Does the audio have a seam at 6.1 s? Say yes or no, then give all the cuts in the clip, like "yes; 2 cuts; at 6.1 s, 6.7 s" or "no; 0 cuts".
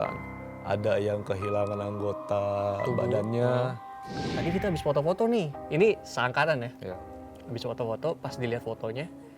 no; 1 cut; at 4.3 s